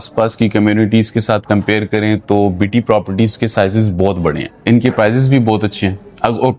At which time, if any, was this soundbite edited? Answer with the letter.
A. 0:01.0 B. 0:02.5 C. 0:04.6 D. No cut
C